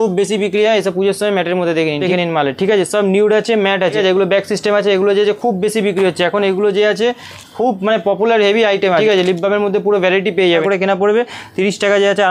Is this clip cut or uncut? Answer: cut